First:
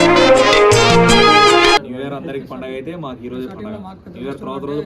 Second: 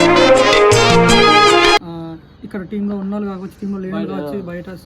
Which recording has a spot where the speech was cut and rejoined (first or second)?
second